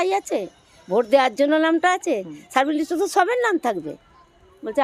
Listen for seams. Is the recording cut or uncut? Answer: uncut